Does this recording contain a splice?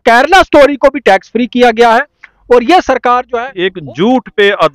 yes; 1 cut; at 3.4 s

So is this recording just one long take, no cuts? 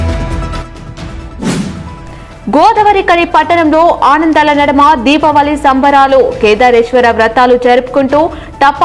yes; 0 cuts

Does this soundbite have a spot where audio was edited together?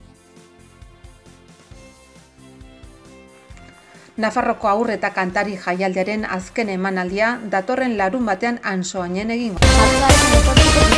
yes; 1 cut; at 9.5 s

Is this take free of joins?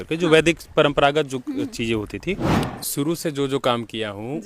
no; 1 cut; at 2.6 s

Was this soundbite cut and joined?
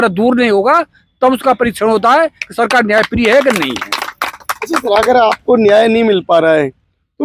no; 0 cuts

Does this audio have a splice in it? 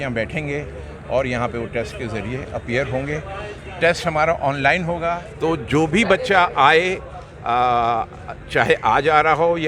yes; 1 cut; at 5.0 s

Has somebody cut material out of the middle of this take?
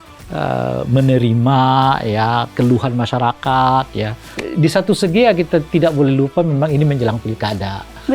yes; 1 cut; at 4.4 s

